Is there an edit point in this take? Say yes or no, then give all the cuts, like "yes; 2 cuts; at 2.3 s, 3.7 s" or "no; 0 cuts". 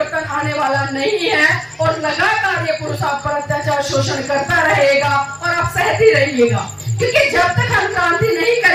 no; 0 cuts